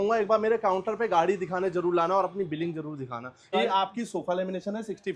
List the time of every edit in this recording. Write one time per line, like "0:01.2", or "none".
0:03.5